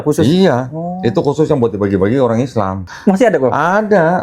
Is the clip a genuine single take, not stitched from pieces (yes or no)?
no